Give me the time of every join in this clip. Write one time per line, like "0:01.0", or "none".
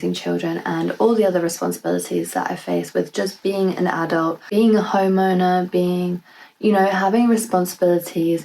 none